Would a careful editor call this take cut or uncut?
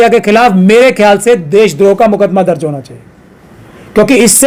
uncut